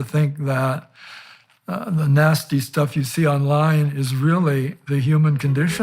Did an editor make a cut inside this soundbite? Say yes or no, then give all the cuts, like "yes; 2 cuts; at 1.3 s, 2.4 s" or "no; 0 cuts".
no; 0 cuts